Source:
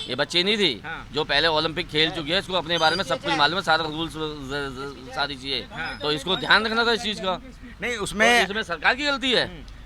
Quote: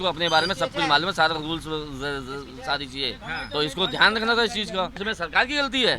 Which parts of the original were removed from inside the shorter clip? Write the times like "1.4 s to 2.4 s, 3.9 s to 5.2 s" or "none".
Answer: 7.5 s to 8.5 s

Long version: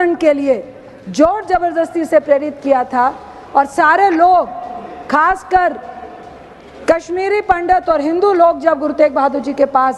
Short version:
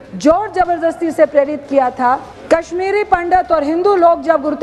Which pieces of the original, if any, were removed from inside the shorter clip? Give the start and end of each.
3.3 s to 6.7 s

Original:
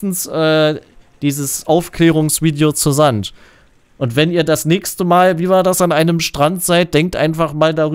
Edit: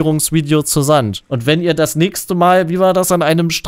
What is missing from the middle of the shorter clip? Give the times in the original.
3.3 s to 3.9 s

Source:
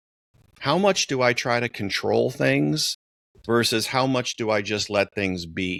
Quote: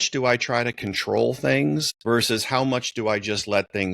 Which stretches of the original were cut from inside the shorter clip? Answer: 2.9 s to 3.3 s

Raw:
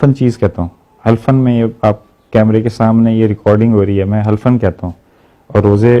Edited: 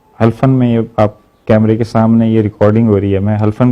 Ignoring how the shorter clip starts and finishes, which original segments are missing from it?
none

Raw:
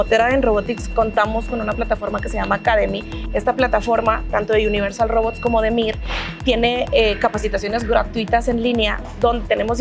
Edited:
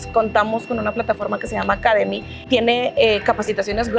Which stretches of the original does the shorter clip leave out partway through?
3.1 s to 6.2 s

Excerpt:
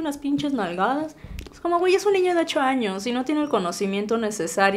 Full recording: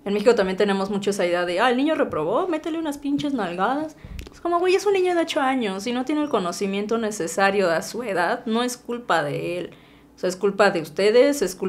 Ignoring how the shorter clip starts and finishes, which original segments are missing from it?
none

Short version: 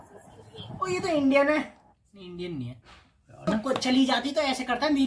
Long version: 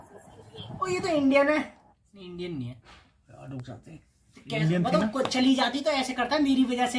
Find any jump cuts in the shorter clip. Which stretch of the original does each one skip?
3.5 s to 5.0 s

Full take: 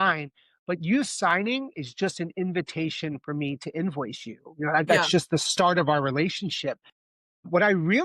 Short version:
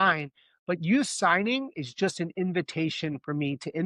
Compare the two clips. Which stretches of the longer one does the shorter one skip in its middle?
none

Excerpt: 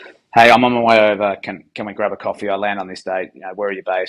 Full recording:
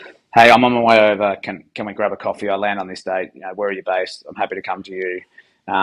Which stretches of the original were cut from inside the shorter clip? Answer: none

